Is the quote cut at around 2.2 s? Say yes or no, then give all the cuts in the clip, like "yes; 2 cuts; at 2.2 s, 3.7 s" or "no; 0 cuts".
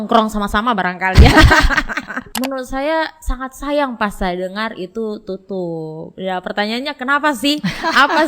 yes; 1 cut; at 2.2 s